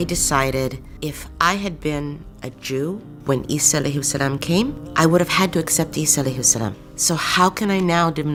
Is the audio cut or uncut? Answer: uncut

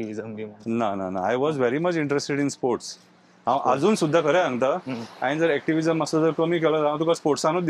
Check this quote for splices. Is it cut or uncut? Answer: uncut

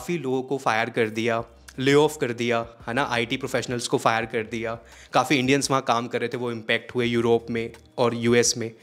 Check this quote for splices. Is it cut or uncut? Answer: uncut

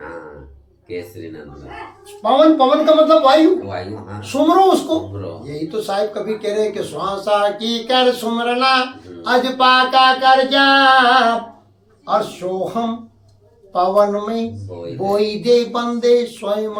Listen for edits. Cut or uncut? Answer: uncut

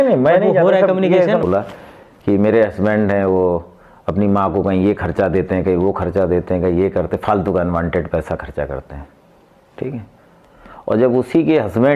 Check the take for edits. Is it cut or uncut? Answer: cut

